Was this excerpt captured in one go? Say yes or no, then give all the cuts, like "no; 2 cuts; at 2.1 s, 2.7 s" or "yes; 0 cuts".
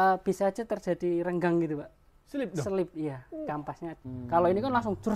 no; 1 cut; at 4.0 s